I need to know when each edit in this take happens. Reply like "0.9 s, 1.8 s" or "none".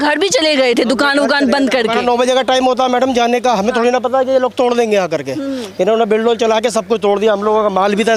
none